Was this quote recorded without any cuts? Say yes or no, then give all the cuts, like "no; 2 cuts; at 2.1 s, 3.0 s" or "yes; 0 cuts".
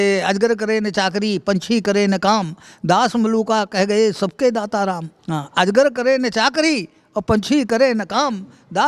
no; 1 cut; at 5.1 s